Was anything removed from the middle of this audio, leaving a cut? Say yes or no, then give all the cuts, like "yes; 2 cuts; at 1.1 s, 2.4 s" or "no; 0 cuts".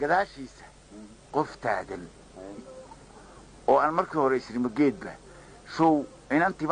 no; 0 cuts